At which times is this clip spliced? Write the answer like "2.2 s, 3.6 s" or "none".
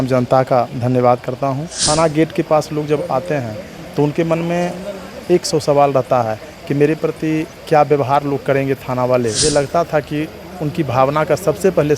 1.7 s, 9.4 s